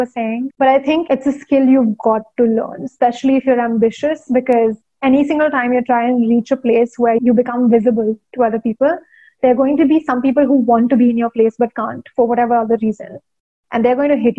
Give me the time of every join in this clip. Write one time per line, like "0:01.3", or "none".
0:07.2